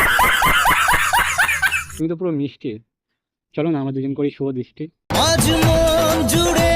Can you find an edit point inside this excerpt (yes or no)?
yes